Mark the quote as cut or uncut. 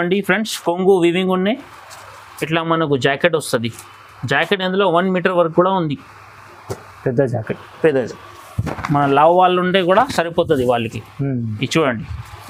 uncut